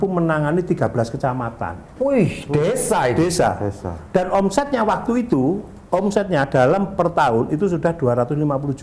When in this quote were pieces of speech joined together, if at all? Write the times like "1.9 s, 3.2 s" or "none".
none